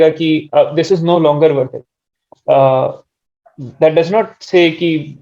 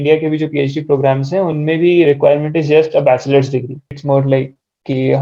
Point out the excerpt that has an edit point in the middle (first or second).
second